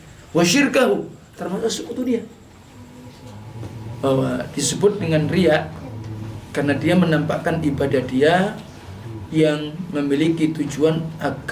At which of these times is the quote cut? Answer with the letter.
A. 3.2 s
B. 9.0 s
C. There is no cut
A